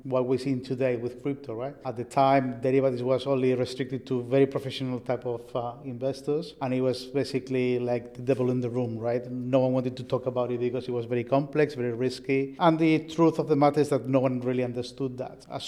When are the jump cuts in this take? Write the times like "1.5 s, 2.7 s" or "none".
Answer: none